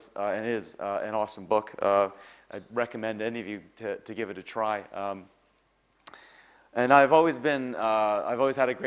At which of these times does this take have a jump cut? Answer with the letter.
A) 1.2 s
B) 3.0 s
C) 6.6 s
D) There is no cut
A